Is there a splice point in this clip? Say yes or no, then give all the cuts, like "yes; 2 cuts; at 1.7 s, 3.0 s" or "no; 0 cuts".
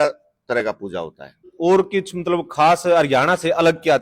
yes; 1 cut; at 1.5 s